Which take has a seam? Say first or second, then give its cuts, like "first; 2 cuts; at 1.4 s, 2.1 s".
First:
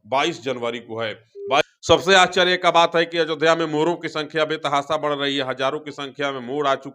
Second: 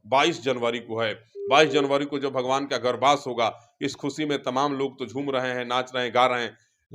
first; 1 cut; at 1.6 s